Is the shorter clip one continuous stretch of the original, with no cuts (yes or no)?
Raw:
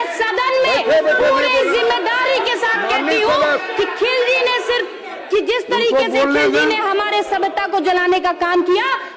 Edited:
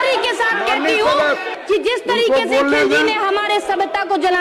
no